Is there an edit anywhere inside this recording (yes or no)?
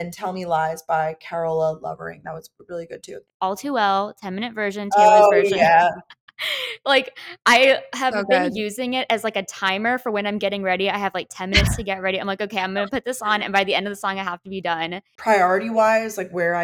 yes